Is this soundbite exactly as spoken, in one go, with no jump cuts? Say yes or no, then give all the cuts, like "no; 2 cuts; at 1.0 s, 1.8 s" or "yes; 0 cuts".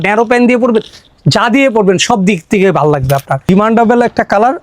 no; 1 cut; at 3.5 s